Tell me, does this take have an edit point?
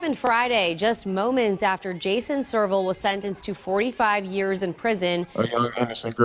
yes; 1 cut; at 5.3 s

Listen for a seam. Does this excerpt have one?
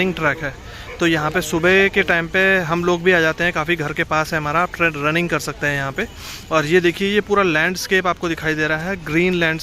no; 0 cuts

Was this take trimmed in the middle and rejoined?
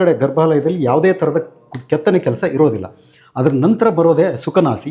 no; 0 cuts

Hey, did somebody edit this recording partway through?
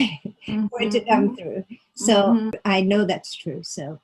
yes; 1 cut; at 2.6 s

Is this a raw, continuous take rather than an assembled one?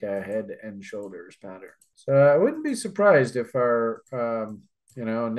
yes; 0 cuts

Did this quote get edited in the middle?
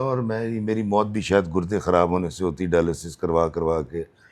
no; 0 cuts

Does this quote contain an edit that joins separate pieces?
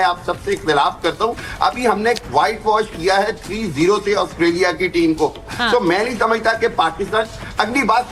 no; 0 cuts

